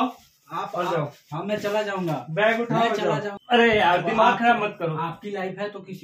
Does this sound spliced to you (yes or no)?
yes